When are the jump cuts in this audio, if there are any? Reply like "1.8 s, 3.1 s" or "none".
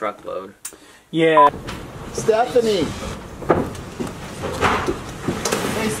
1.5 s